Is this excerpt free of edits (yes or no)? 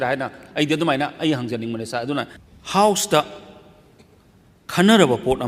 no